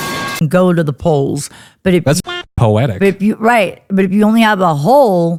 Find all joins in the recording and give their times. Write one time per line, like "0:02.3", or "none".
none

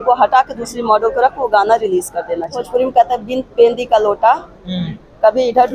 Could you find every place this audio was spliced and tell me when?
0:02.6

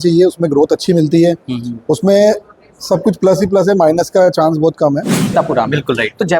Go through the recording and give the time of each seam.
0:05.3

